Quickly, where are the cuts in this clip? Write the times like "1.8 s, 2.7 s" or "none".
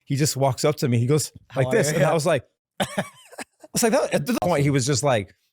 4.4 s